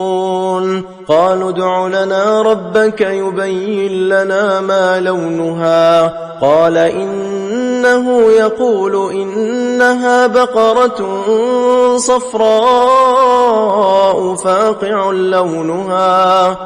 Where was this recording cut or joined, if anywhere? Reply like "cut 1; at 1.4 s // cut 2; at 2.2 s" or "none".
none